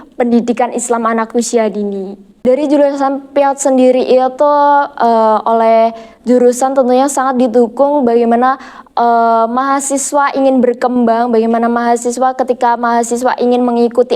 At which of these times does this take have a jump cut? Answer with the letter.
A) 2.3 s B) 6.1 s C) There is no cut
A